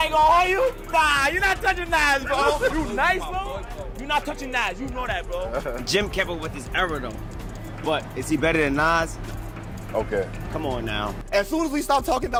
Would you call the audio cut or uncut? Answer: uncut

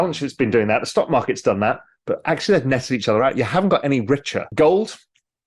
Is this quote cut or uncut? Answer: cut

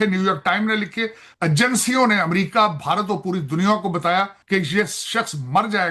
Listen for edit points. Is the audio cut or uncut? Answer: cut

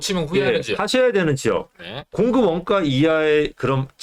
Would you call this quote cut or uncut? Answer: uncut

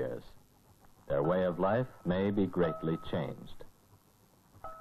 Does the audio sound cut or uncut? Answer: cut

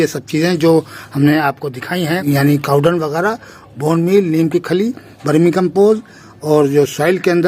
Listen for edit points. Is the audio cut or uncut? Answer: cut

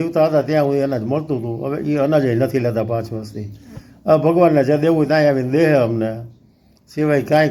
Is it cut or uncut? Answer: uncut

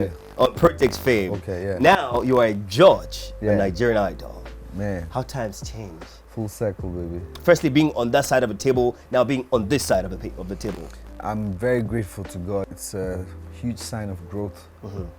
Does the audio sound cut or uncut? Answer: uncut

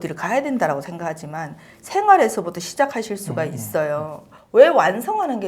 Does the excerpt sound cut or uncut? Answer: cut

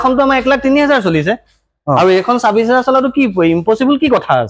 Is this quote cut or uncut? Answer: uncut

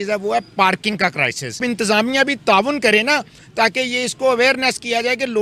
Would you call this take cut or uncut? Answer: cut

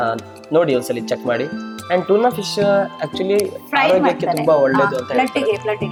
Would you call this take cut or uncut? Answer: uncut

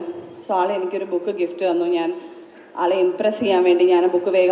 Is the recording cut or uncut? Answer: uncut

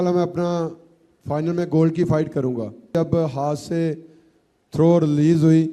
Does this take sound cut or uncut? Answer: cut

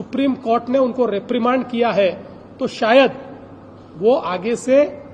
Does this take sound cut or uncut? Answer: uncut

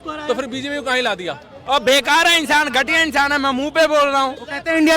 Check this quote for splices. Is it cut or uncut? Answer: cut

